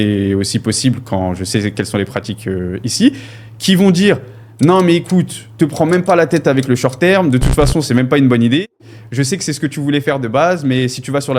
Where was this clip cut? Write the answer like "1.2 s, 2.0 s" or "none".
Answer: none